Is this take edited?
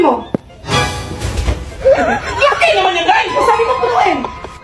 no; 0 cuts

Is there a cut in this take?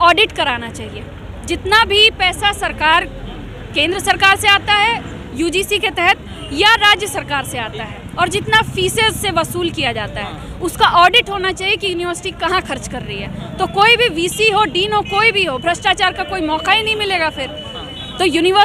no; 0 cuts

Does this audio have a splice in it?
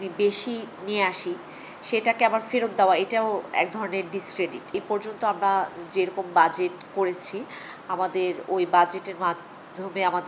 no; 0 cuts

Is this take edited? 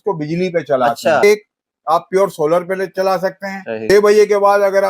yes; 2 cuts; at 1.2 s, 3.9 s

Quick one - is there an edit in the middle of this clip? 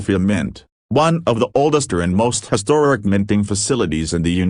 no; 0 cuts

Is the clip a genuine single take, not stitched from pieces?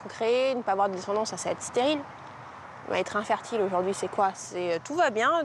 yes; 0 cuts

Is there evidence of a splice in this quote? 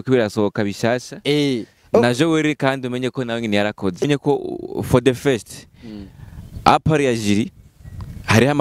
yes; 1 cut; at 4.0 s

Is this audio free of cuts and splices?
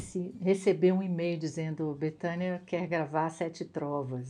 yes; 0 cuts

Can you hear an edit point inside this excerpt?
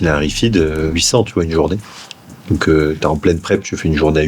yes; 1 cut; at 0.9 s

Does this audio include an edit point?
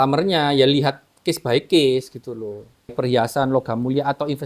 yes; 1 cut; at 2.9 s

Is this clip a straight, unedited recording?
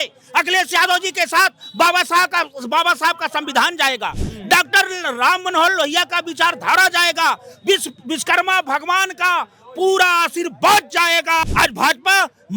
no; 1 cut; at 11.4 s

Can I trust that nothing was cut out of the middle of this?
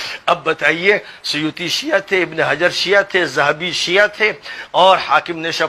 yes; 0 cuts

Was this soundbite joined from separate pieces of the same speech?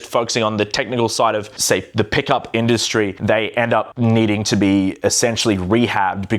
no; 0 cuts

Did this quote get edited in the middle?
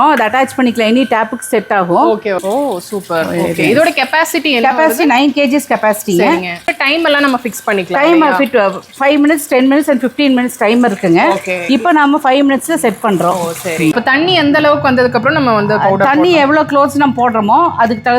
yes; 3 cuts; at 2.4 s, 6.7 s, 13.9 s

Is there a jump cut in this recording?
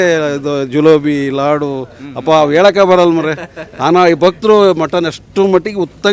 no; 0 cuts

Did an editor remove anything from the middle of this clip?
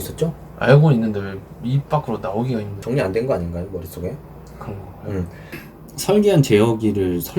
yes; 2 cuts; at 2.7 s, 5.5 s

